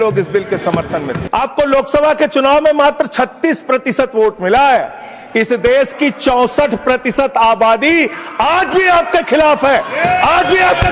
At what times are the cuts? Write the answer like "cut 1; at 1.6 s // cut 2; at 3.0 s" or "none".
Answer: cut 1; at 1.2 s